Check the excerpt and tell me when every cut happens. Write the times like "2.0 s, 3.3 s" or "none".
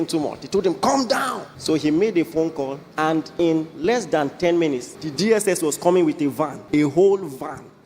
1.5 s, 2.8 s, 5.0 s, 6.6 s